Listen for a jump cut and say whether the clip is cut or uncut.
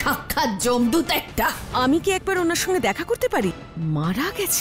cut